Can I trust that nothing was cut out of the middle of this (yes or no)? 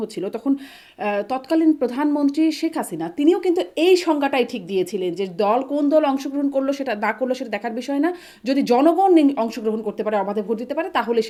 yes